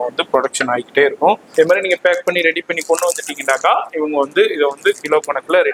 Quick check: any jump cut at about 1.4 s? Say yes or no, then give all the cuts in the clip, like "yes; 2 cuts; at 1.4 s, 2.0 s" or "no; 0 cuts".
yes; 1 cut; at 1.4 s